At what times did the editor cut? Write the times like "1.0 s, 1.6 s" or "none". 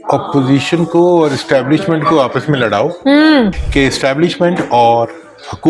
3.6 s